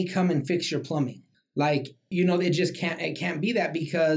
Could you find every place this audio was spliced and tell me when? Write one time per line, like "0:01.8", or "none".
0:01.8